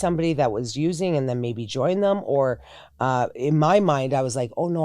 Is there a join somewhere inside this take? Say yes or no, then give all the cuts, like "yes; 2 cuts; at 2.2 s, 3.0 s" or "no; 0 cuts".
no; 0 cuts